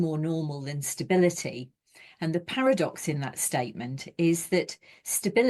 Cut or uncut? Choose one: uncut